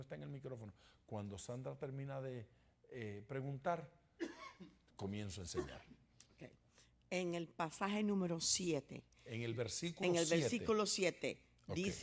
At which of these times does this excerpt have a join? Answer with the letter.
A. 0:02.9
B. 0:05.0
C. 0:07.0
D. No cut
B